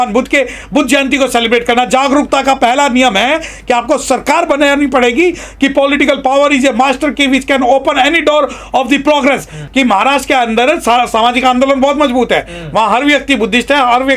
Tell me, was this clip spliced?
yes; 1 cut; at 9.6 s

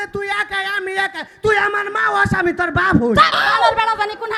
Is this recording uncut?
yes; 0 cuts

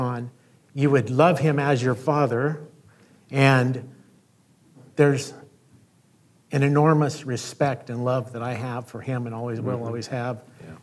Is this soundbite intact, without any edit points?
no; 1 cut; at 4.8 s

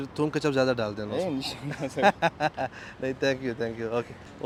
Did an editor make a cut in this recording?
no; 0 cuts

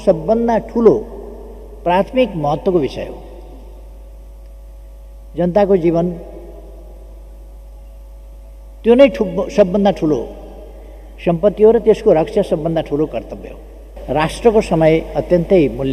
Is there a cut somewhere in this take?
yes; 1 cut; at 13.9 s

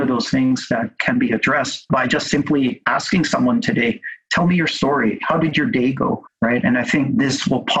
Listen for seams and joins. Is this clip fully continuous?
no; 2 cuts; at 1.9 s, 6.3 s

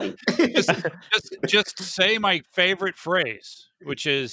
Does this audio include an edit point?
no; 0 cuts

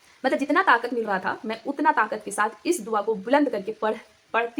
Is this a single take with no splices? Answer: yes; 0 cuts

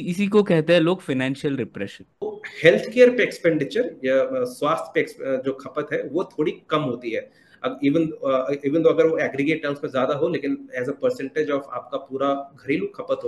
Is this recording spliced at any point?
yes; 1 cut; at 2.3 s

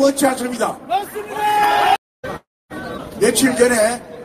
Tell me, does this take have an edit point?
yes; 1 cut; at 2.0 s

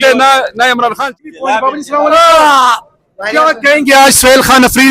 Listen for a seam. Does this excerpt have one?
yes; 1 cut; at 1.1 s

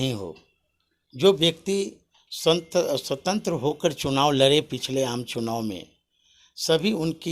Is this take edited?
no; 0 cuts

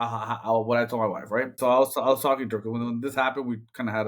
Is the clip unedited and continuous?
no; 1 cut; at 1.5 s

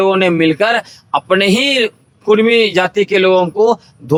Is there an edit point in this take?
no; 0 cuts

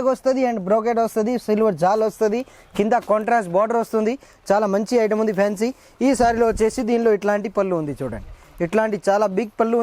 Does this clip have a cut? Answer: no; 0 cuts

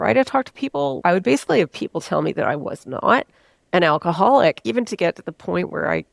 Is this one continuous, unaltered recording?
yes; 0 cuts

